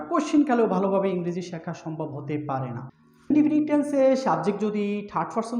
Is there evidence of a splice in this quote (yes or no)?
yes